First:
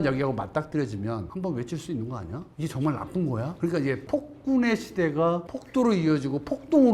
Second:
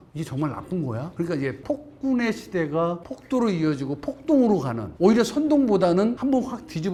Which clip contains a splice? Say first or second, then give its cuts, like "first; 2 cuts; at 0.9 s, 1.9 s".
first; 1 cut; at 1.3 s